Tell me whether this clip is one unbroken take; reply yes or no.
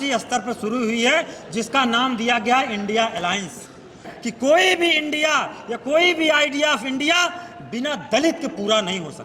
no